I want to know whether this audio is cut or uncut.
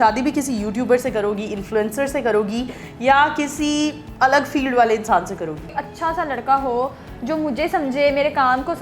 cut